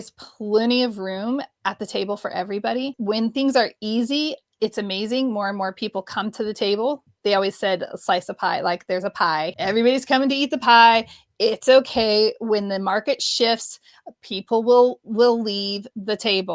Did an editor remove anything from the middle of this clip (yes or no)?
yes